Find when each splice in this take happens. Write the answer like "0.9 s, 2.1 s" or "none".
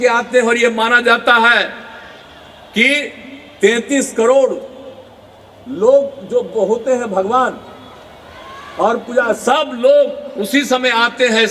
none